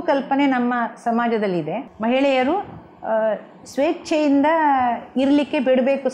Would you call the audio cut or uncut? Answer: cut